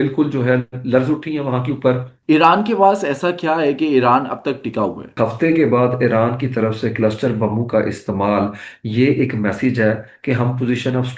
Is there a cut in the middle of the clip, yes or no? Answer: yes